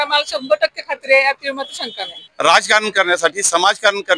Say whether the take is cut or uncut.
cut